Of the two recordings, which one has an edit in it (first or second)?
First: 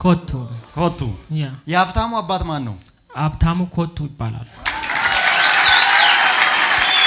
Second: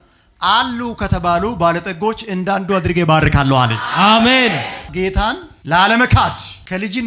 second